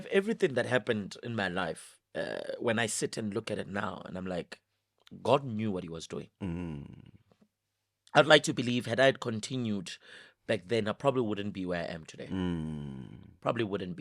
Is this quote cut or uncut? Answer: uncut